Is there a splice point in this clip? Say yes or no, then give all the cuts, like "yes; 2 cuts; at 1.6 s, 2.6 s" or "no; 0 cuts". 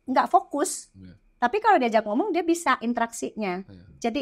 no; 0 cuts